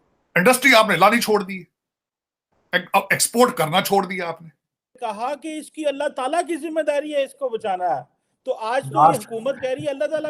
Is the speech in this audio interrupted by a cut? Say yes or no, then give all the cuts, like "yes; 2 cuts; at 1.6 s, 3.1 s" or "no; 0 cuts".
yes; 1 cut; at 4.9 s